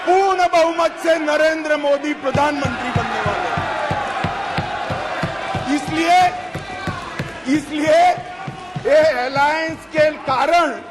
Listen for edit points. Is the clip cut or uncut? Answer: uncut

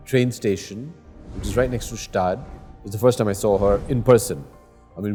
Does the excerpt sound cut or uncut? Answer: uncut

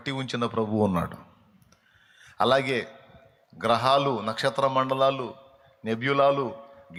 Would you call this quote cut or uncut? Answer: uncut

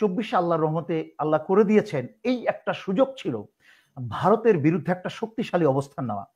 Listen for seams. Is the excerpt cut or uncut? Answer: uncut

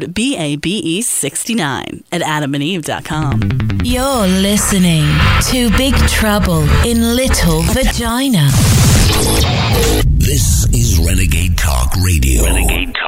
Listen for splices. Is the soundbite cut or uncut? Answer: cut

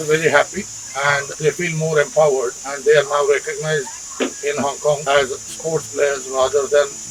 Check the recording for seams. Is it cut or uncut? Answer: uncut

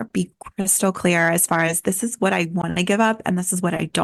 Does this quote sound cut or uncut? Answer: uncut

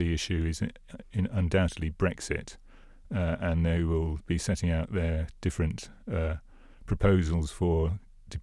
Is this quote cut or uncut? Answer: uncut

